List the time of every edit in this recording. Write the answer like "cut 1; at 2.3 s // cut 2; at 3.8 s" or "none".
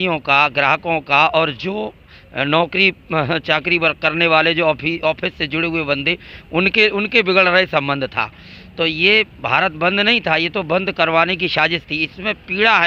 none